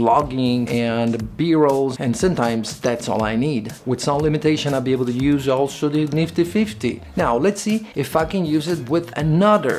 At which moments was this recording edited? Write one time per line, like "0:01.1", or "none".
0:01.9
0:07.0